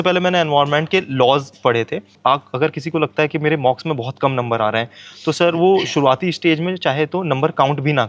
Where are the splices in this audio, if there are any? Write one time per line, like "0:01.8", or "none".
0:02.1